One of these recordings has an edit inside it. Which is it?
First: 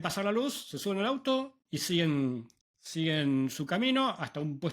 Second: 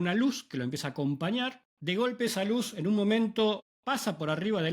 second; 2 cuts; at 1.7 s, 3.7 s

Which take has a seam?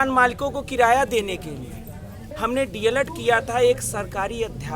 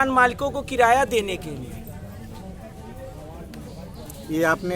first; 1 cut; at 2.3 s

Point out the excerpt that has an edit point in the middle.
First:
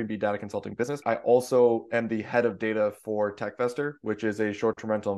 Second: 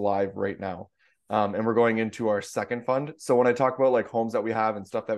first; 1 cut; at 1.0 s

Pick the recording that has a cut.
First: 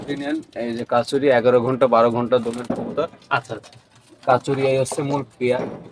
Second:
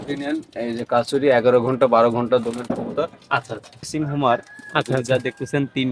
second; 1 cut; at 3.9 s

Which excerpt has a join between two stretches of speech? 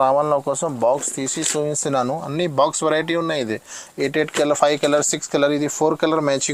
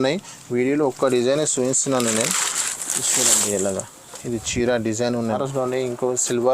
second; 1 cut; at 5.4 s

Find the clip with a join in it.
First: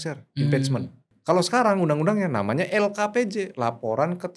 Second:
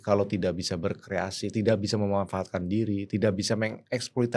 first; 1 cut; at 1.0 s

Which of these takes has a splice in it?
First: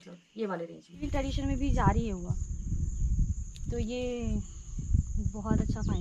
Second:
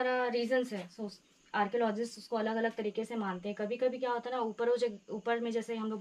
first; 1 cut; at 1.1 s

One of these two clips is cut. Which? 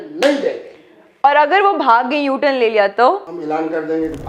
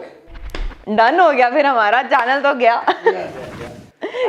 first; 1 cut; at 3.3 s

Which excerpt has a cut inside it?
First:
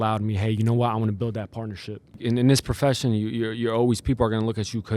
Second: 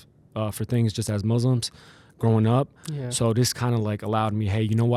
first; 1 cut; at 2.2 s

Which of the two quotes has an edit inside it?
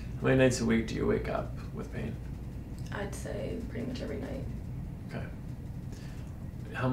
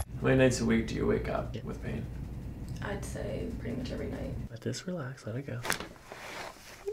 second; 2 cuts; at 1.6 s, 4.5 s

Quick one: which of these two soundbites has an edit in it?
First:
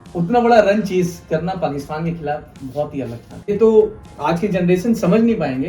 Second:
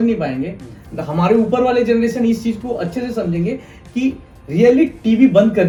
first; 1 cut; at 3.5 s

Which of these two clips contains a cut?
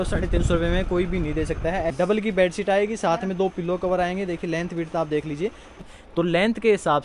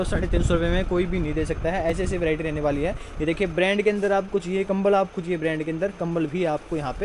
first; 2 cuts; at 1.9 s, 5.7 s

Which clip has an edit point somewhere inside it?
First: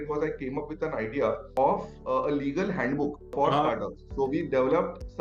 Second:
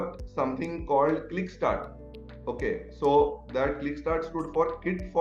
first; 2 cuts; at 1.5 s, 3.2 s

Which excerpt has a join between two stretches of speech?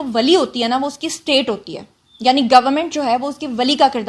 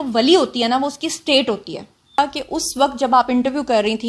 second; 1 cut; at 2.2 s

